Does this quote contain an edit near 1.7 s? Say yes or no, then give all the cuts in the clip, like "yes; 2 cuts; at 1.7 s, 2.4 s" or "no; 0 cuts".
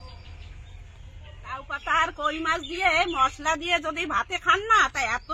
yes; 1 cut; at 1.7 s